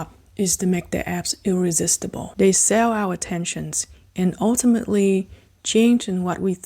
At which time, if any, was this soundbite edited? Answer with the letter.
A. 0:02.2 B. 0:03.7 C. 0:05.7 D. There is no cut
A